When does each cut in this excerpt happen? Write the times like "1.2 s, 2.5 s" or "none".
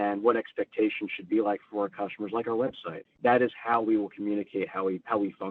2.9 s